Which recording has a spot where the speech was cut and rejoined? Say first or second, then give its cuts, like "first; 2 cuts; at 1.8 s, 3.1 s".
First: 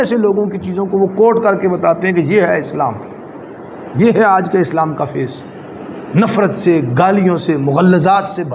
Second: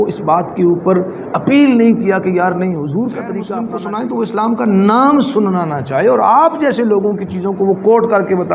second; 1 cut; at 3.6 s